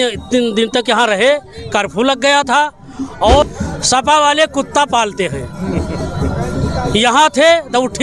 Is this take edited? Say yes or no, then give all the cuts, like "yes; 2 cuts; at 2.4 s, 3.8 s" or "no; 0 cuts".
yes; 1 cut; at 3.4 s